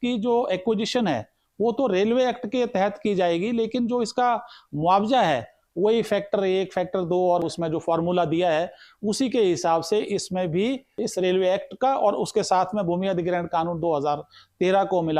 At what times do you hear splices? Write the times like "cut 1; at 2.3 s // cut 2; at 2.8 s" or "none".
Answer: cut 1; at 5.6 s // cut 2; at 7.4 s // cut 3; at 10.9 s